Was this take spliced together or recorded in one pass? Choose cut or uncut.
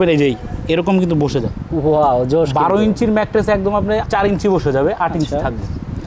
uncut